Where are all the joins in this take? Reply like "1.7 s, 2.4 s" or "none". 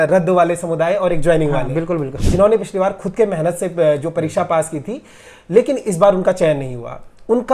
2.1 s